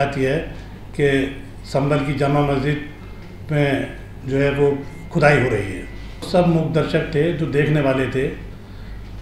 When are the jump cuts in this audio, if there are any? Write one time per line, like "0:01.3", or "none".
0:06.3